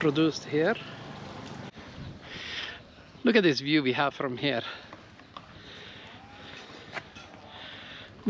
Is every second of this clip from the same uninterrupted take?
no; 1 cut; at 1.7 s

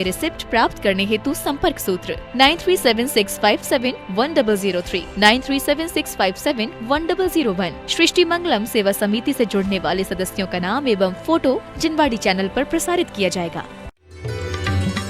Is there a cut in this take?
yes; 1 cut; at 13.9 s

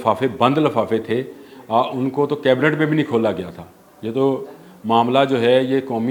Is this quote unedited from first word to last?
yes; 0 cuts

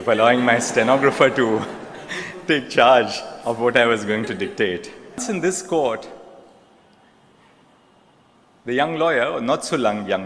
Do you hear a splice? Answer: no; 0 cuts

